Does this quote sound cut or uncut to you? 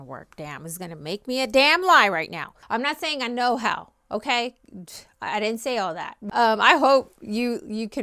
cut